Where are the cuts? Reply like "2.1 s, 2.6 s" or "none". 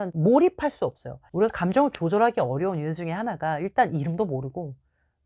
1.1 s